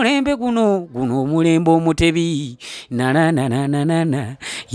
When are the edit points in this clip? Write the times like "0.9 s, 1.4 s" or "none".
none

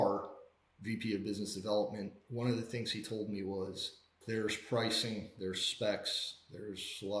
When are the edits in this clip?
2.2 s, 4.2 s

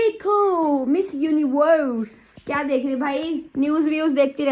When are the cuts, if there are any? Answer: 2.4 s

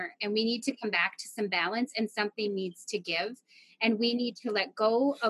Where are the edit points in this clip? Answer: none

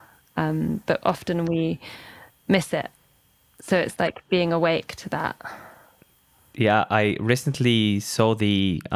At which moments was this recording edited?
none

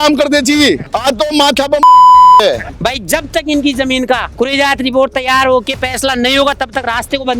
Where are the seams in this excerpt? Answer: 2.4 s, 4.3 s

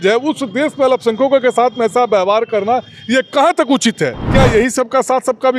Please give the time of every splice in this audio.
4.2 s

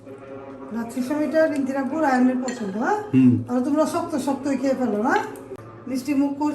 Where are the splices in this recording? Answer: 5.4 s

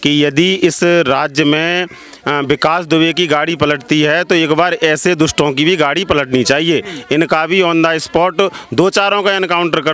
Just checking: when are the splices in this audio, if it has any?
none

